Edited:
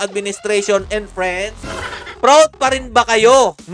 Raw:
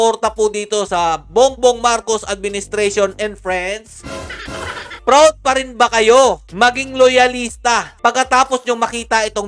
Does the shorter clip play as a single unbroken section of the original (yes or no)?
no